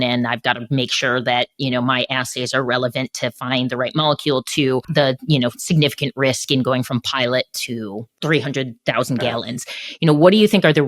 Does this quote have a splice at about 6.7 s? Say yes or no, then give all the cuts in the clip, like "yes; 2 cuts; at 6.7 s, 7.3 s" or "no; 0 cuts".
no; 2 cuts; at 4.9 s, 8.1 s